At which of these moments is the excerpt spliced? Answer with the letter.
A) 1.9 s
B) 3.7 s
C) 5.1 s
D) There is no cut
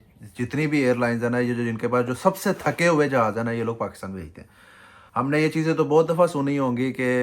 D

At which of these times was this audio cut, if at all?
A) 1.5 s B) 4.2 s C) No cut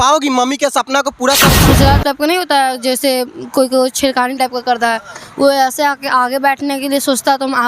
A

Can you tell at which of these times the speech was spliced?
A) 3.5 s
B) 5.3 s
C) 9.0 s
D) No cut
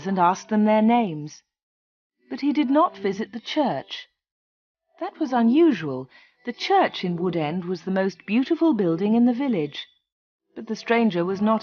A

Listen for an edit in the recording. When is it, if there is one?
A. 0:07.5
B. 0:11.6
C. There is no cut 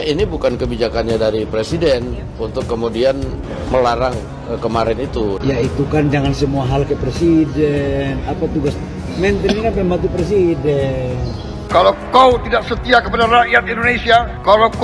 B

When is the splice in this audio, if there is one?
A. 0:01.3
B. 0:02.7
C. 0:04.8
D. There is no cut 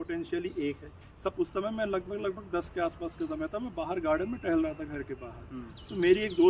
A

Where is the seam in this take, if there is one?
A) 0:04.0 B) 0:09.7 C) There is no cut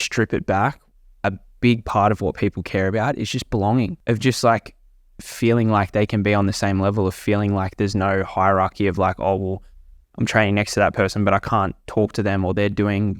A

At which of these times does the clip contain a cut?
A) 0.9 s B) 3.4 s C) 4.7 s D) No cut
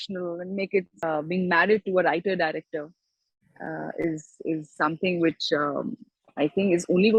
A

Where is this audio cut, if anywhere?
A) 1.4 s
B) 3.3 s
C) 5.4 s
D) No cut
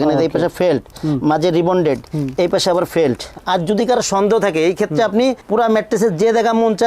B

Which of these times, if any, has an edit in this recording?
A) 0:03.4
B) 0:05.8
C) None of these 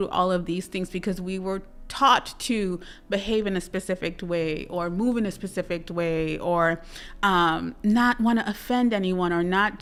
C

